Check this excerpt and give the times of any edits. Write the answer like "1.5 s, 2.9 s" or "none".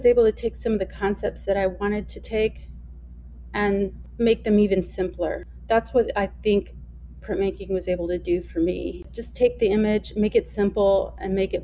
4.0 s, 5.5 s, 9.0 s

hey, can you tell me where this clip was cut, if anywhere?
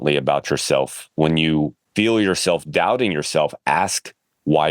1.8 s

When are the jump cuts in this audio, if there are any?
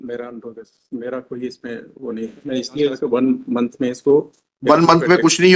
3.0 s

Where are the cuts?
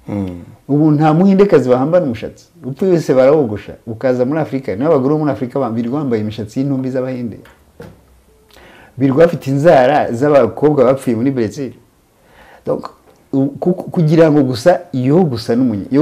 none

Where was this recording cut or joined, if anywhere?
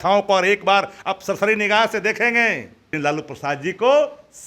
2.9 s

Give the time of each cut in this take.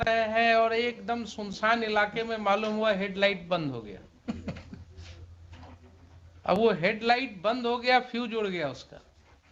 none

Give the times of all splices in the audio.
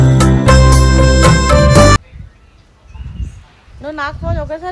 none

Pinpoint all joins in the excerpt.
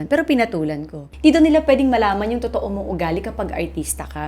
1.0 s

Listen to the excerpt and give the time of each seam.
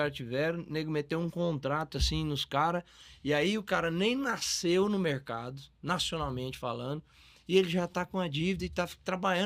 none

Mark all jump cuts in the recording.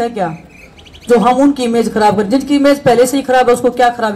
none

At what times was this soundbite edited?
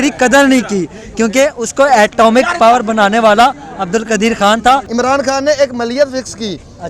4.9 s

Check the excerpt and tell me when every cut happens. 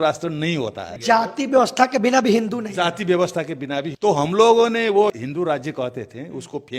0.9 s, 3.9 s, 5.1 s

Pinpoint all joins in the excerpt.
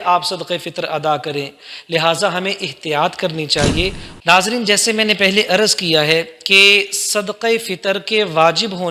4.1 s

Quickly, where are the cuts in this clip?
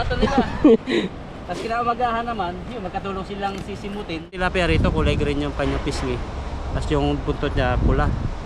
4.4 s

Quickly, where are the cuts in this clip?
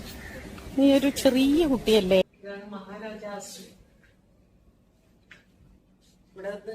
2.2 s

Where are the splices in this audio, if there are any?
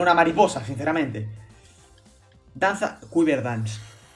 none

